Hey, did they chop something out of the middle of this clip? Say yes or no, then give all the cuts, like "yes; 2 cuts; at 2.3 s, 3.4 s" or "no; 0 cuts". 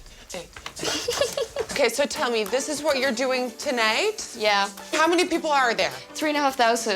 yes; 1 cut; at 1.7 s